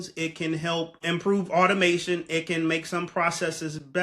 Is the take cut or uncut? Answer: cut